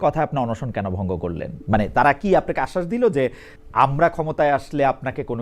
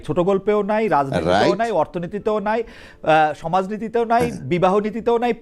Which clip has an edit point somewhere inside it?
first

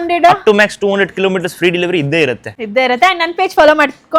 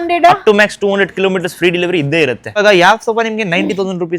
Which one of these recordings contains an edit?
second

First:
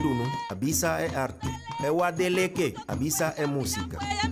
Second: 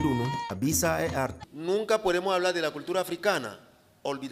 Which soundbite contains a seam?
first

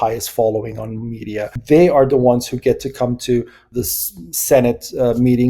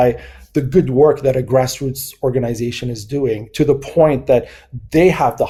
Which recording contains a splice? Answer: first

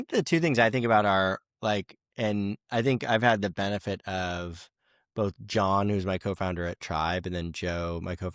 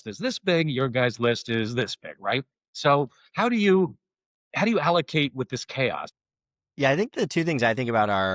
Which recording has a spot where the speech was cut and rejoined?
second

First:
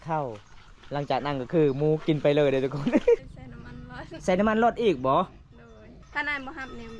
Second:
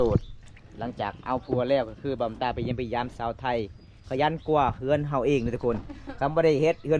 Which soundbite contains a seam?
first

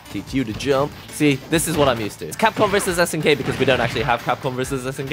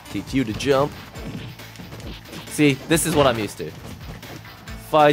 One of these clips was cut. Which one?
first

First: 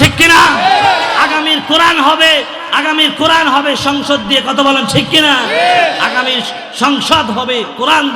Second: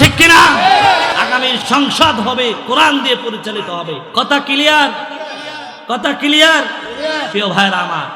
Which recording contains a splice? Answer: second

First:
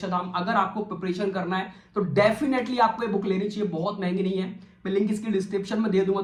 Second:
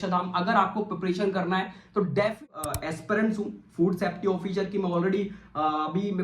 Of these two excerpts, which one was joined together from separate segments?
second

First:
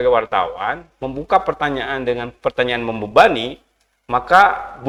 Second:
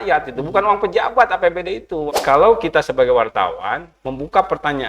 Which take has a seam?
second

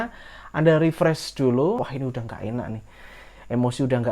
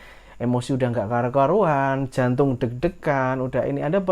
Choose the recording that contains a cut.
first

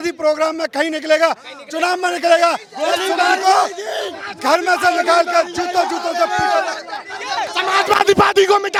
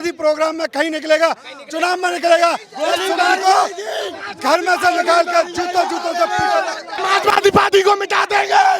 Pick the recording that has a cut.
second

